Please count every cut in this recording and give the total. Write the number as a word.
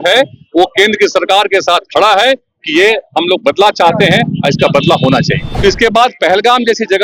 one